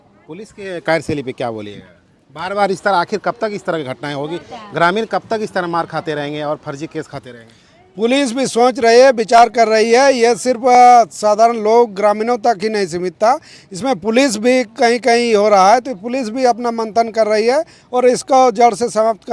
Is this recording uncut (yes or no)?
yes